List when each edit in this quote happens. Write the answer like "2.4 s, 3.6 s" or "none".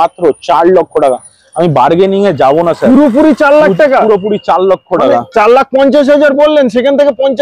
none